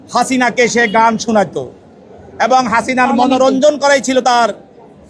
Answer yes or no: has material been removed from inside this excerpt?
no